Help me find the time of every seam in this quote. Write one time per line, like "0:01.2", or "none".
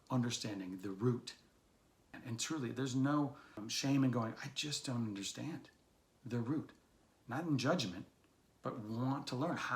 0:02.1
0:03.6

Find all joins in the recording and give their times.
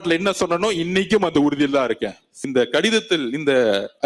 0:02.3

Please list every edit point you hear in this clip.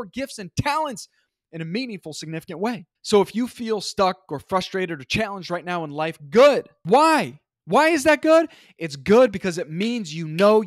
0:02.9
0:06.7

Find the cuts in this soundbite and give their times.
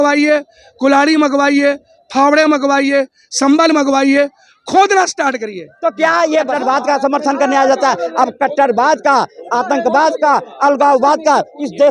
0:06.5

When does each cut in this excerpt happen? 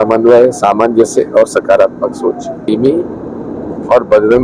0:02.6

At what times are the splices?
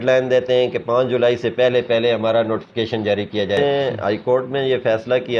0:03.6

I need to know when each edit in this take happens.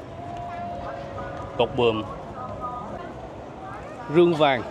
0:03.0

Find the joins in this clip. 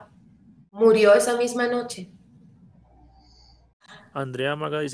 0:00.8
0:03.9

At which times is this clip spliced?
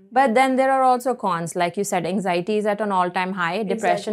none

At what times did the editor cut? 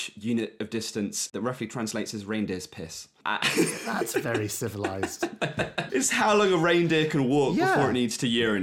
0:01.4
0:03.2
0:05.9

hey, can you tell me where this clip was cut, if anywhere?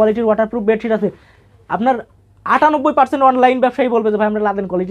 none

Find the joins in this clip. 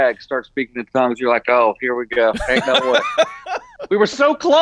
0:03.6

